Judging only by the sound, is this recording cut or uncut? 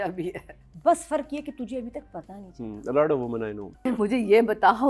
cut